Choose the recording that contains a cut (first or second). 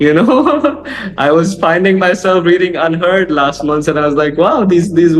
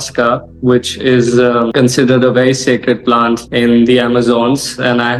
second